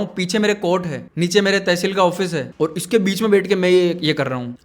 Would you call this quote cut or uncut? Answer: uncut